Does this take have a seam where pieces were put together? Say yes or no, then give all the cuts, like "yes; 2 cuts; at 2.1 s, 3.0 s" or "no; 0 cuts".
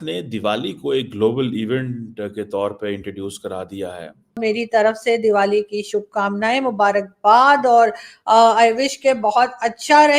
yes; 1 cut; at 4.4 s